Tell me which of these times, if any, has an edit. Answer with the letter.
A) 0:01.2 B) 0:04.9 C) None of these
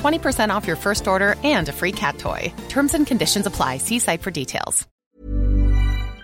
B